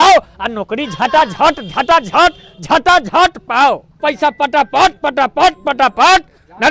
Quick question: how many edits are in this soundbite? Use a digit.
1